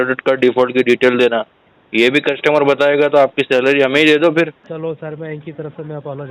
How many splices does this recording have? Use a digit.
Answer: 1